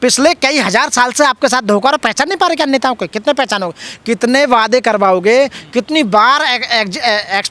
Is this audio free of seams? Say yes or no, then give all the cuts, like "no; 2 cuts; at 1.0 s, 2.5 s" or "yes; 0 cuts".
yes; 0 cuts